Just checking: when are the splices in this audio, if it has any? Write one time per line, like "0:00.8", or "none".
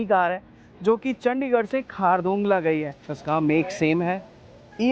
0:03.2